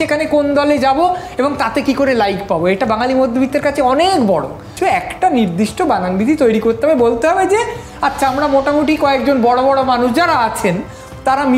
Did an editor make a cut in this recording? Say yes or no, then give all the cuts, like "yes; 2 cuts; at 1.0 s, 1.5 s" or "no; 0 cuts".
yes; 1 cut; at 4.7 s